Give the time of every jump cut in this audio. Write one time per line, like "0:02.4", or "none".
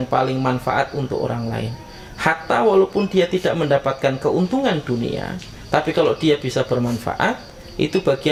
none